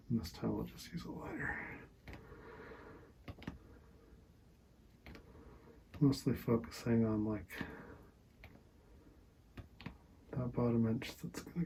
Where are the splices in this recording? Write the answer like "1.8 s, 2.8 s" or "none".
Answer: none

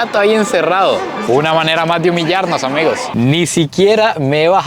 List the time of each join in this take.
1.2 s, 3.1 s

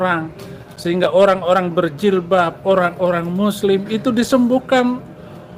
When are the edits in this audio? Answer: none

